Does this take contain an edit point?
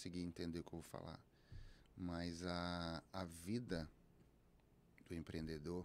no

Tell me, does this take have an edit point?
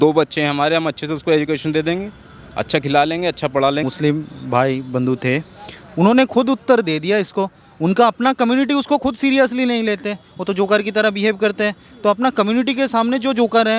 yes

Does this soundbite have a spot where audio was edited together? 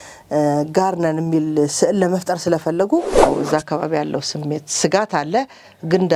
yes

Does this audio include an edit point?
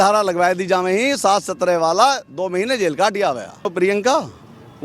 yes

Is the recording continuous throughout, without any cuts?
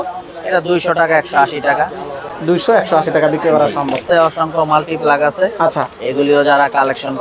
yes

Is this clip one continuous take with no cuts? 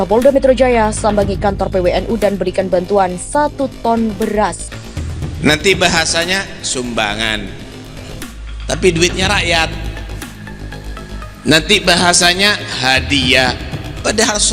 no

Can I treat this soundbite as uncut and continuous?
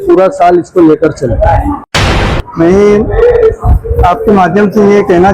no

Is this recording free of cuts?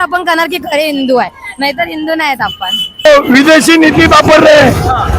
no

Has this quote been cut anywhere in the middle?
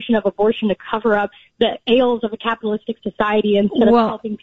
no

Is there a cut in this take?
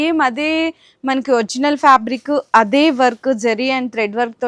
no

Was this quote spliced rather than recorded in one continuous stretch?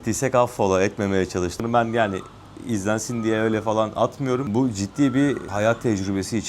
yes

